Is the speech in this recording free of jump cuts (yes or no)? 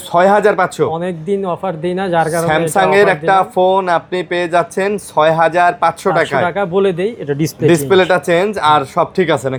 yes